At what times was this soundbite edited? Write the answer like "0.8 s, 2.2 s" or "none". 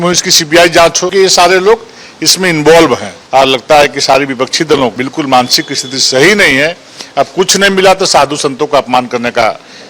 1.0 s, 3.1 s, 5.0 s